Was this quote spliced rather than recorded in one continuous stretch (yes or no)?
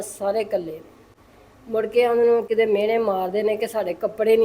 no